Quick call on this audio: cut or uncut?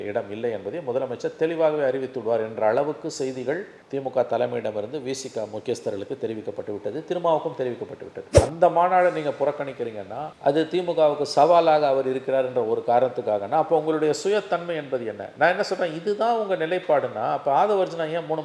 cut